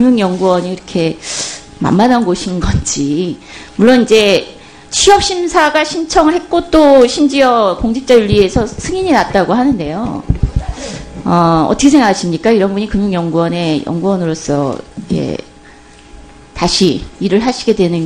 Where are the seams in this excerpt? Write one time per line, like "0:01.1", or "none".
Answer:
none